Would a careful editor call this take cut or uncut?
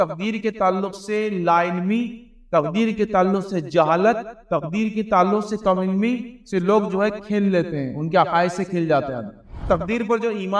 cut